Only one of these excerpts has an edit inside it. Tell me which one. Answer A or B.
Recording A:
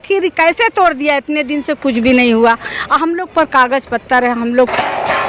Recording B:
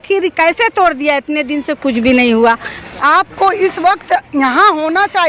B